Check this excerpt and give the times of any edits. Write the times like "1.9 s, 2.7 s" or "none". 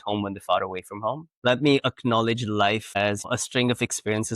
1.3 s, 3.3 s